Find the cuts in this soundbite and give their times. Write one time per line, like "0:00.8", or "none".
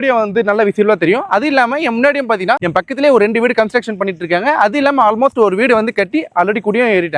none